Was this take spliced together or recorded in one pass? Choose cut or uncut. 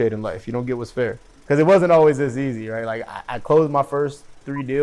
cut